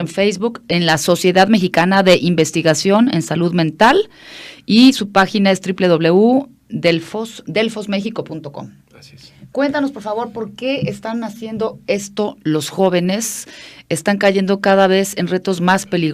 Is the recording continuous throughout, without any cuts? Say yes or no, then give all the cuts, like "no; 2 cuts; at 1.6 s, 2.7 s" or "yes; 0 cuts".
no; 1 cut; at 6.2 s